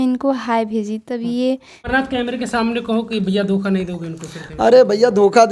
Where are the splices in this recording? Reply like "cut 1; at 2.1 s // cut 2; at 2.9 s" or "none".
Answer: cut 1; at 1.9 s